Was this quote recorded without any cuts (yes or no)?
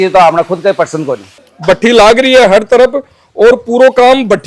no